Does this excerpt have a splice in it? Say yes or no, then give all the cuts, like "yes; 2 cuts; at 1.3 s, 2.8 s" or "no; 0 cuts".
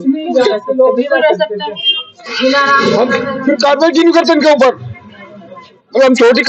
no; 0 cuts